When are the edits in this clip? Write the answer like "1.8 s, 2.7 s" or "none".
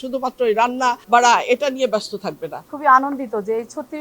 2.6 s